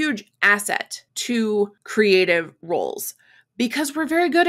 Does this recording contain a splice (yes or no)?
no